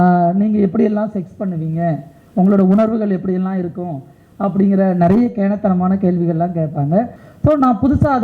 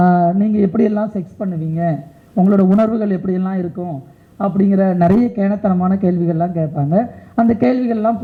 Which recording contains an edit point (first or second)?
first